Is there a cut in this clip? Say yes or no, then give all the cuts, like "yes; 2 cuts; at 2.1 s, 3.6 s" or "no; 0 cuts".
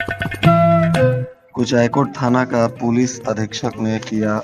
yes; 1 cut; at 1.3 s